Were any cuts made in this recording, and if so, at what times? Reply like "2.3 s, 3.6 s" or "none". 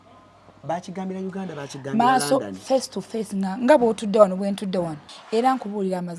5.1 s

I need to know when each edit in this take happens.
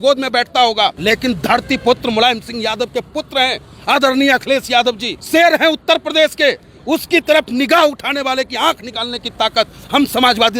1.0 s, 5.1 s

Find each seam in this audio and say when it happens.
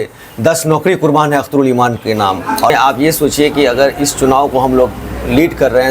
2.7 s

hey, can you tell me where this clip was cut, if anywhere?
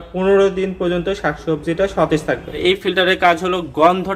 2.6 s

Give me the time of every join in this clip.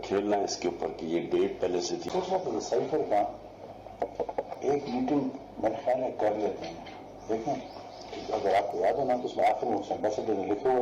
2.0 s

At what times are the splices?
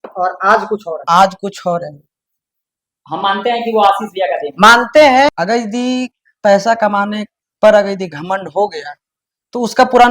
5.3 s

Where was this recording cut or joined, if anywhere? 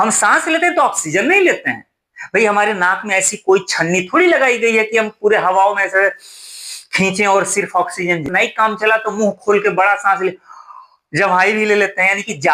8.2 s

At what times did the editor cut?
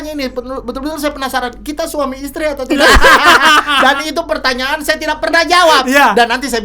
none

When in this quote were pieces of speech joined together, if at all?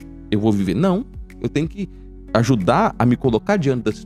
none

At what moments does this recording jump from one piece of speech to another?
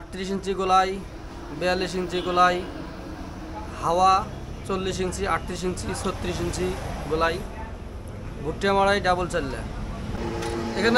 none

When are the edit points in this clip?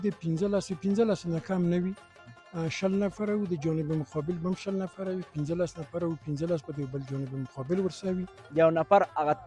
5.3 s, 8.4 s

